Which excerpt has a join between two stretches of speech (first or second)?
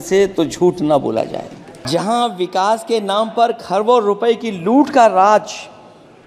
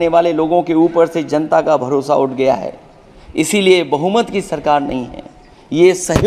first